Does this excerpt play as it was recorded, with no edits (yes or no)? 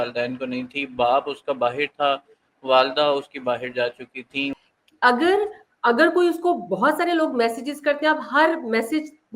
no